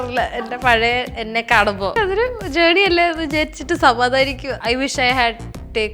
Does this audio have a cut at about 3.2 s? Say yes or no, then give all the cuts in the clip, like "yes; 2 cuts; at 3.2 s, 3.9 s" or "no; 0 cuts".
no; 2 cuts; at 1.9 s, 4.5 s